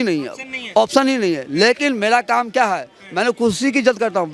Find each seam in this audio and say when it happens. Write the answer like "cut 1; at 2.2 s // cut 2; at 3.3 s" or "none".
none